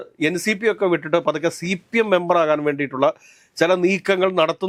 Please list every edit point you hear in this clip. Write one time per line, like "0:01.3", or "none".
none